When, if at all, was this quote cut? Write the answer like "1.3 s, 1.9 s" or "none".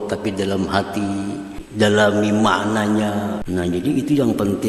1.6 s, 3.4 s